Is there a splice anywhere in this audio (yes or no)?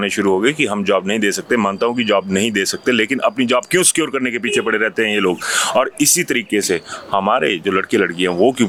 no